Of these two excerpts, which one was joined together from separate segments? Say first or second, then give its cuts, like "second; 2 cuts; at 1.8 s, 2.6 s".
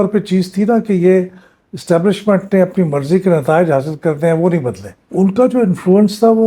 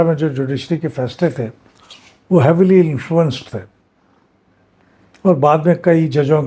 first; 1 cut; at 5.0 s